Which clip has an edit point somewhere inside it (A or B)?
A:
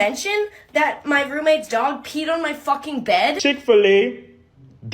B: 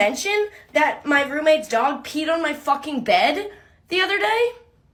A